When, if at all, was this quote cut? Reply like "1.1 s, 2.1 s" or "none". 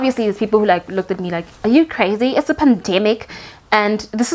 none